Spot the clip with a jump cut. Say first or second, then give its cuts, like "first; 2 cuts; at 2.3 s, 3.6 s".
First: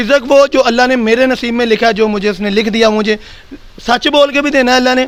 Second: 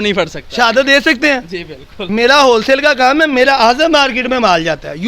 second; 1 cut; at 2.0 s